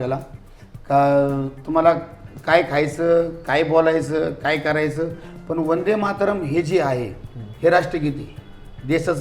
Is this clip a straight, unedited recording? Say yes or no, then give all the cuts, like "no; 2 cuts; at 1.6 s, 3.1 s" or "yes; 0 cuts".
yes; 0 cuts